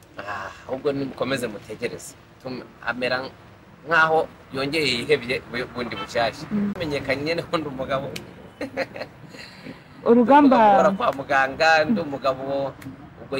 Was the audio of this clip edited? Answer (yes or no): yes